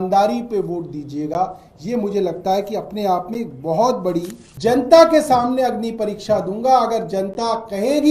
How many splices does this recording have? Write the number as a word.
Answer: one